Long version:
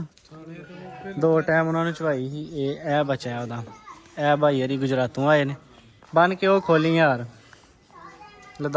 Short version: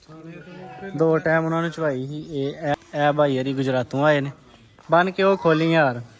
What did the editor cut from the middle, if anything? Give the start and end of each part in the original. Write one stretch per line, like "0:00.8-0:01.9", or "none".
0:03.0-0:04.0